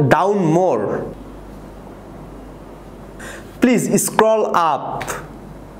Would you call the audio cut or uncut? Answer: cut